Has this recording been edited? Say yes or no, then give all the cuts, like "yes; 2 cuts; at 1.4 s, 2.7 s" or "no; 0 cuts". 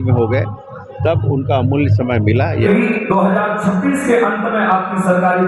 yes; 1 cut; at 2.7 s